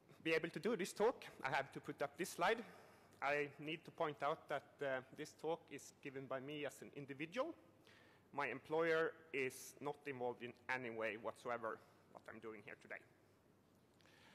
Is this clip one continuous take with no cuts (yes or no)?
no